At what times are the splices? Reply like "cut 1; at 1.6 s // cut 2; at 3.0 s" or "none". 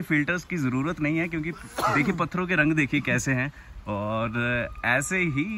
none